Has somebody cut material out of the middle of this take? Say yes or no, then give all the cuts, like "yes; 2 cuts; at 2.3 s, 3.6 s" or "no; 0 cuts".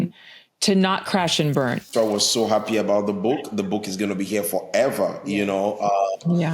yes; 1 cut; at 1.9 s